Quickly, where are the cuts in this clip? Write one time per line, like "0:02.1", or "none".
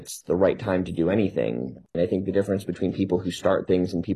0:01.9